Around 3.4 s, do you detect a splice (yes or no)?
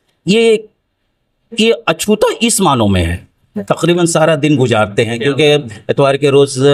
yes